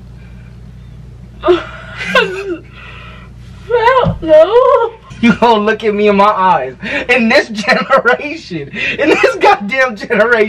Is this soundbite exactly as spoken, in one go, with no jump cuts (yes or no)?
no